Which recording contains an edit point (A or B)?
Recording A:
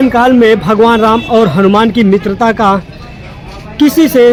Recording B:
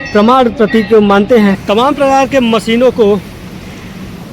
B